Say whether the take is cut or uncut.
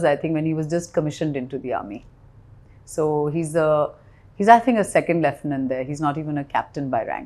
uncut